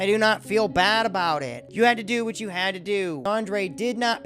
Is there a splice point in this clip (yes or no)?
yes